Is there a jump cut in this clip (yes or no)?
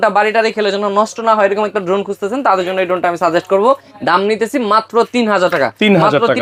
no